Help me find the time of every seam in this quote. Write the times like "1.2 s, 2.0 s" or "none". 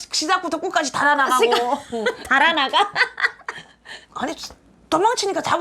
4.0 s